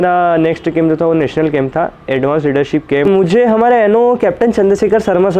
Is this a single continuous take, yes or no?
no